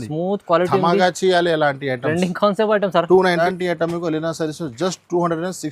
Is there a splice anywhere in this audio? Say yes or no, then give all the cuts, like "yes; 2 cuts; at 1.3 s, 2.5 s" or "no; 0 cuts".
yes; 1 cut; at 3.4 s